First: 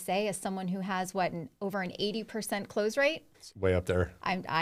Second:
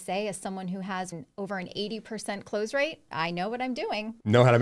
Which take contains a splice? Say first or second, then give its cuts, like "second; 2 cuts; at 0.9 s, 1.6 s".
second; 2 cuts; at 1.1 s, 3.1 s